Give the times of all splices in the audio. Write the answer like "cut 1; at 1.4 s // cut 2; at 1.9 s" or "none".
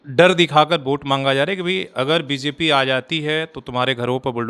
none